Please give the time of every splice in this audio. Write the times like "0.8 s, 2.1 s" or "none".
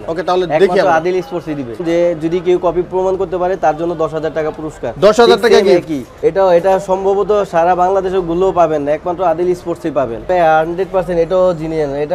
1.8 s, 6.0 s, 10.3 s

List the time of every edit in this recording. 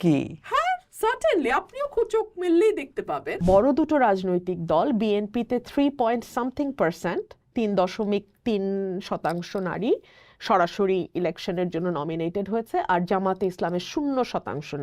3.4 s

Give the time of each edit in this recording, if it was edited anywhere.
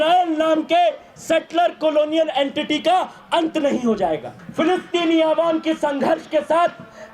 4.4 s

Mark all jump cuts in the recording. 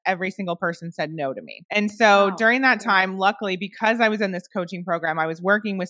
1.5 s

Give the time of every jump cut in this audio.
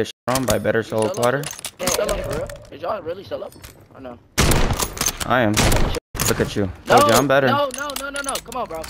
1.8 s, 2.6 s

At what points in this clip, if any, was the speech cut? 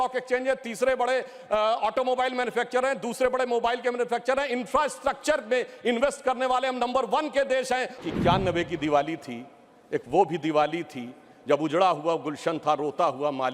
8.0 s

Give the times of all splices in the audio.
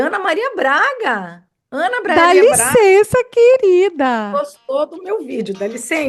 none

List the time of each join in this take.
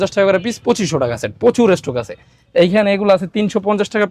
none

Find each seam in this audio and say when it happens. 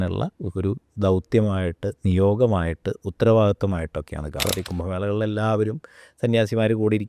4.5 s

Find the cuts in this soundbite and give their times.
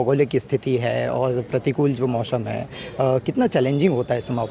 none

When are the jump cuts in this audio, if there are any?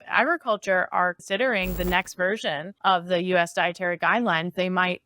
1.2 s, 2.7 s

